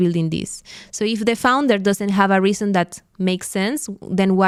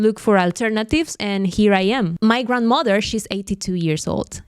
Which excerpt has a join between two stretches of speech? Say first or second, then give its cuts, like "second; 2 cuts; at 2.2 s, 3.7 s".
second; 1 cut; at 2.1 s